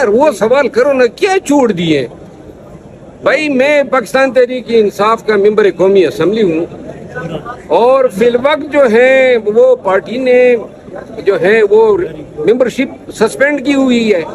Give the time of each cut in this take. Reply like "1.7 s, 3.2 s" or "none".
none